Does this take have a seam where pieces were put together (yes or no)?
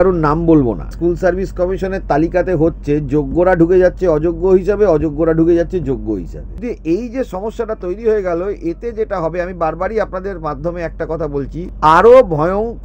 yes